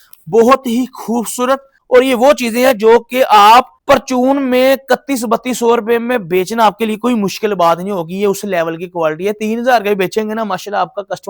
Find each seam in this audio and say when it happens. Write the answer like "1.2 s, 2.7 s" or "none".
1.7 s, 3.7 s